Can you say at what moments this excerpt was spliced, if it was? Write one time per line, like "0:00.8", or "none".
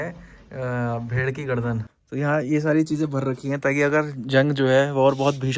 0:01.9